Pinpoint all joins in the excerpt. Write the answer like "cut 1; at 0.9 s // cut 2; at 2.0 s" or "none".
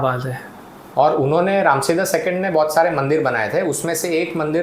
none